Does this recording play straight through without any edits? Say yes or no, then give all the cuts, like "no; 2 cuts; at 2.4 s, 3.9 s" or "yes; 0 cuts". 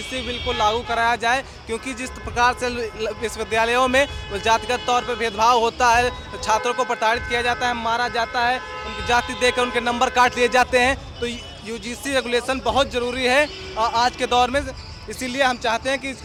yes; 0 cuts